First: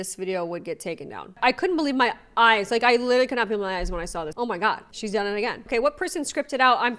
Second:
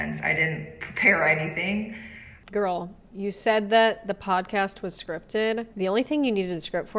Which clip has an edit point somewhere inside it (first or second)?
first